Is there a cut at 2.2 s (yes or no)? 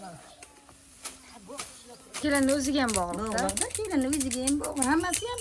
yes